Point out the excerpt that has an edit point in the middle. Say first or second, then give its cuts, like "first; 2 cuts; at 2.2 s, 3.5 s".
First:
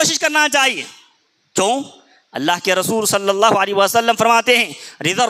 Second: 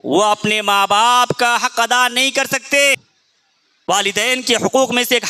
second; 1 cut; at 3.2 s